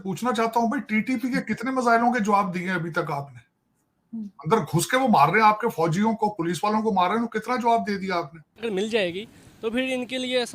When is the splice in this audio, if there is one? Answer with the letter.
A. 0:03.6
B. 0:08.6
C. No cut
B